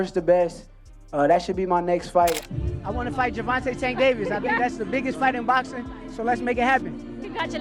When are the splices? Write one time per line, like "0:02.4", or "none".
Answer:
0:02.5

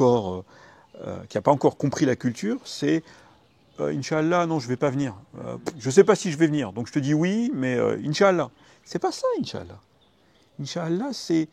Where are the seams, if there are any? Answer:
none

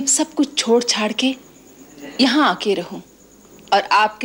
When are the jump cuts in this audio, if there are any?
none

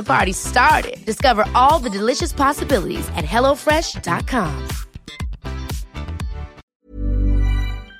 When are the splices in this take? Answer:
0:06.7

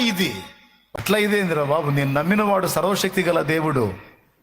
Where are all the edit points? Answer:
0:01.0

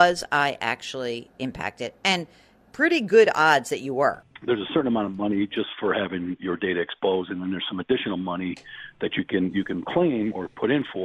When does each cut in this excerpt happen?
0:04.2

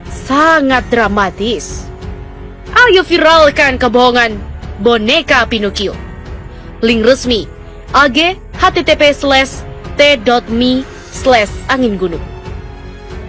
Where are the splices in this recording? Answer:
0:12.2

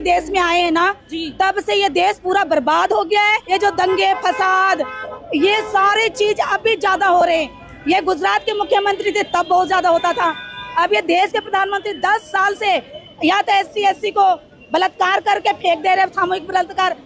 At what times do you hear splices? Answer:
none

